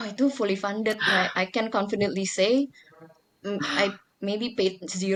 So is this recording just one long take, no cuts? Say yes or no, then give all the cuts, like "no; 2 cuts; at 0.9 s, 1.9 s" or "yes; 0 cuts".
yes; 0 cuts